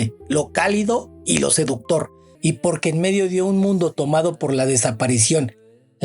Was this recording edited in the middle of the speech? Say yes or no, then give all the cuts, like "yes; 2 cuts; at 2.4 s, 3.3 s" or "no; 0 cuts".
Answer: yes; 1 cut; at 2.2 s